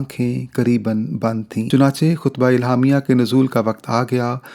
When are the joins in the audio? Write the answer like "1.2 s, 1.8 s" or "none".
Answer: 1.7 s